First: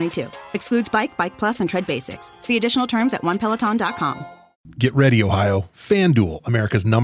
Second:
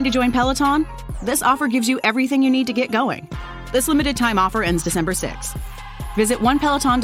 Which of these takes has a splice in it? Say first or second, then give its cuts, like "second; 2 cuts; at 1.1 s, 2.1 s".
first; 1 cut; at 4.7 s